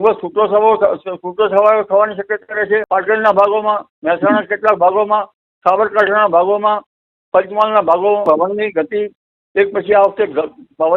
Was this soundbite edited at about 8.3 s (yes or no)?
yes